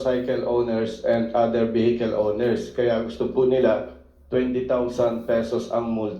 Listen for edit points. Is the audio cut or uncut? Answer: uncut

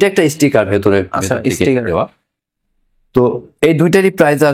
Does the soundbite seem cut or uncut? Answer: uncut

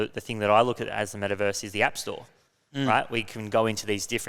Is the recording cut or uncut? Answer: uncut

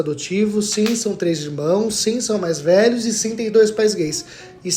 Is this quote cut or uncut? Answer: uncut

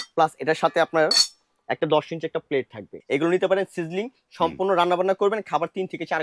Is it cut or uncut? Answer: cut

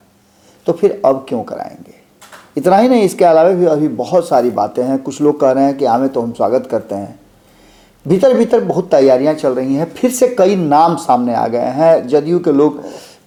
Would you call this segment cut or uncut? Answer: uncut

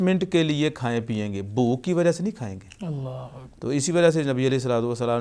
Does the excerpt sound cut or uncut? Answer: uncut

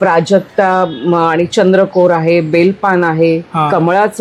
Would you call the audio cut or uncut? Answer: uncut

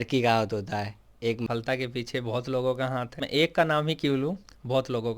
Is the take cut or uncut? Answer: cut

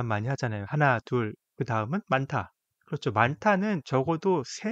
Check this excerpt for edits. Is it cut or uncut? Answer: uncut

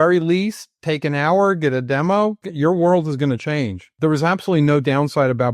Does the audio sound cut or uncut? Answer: cut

